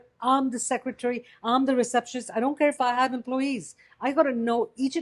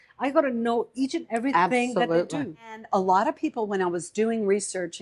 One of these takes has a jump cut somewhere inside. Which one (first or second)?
second